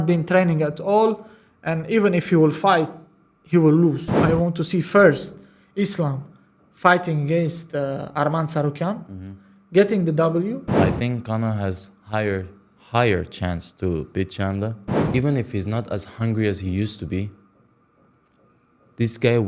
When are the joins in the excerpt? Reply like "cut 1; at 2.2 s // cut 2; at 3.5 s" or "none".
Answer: cut 1; at 4.2 s // cut 2; at 10.7 s // cut 3; at 14.9 s